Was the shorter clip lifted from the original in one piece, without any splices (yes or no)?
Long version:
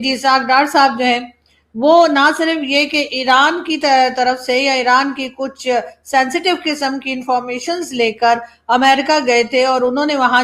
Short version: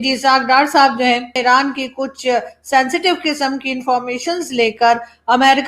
no